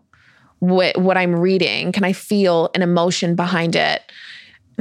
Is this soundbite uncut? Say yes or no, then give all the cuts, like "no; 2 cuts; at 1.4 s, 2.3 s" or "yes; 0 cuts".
yes; 0 cuts